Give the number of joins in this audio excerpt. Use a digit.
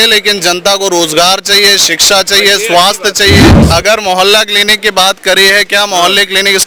1